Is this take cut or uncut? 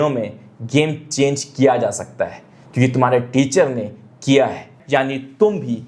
cut